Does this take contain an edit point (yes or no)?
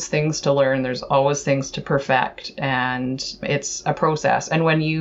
no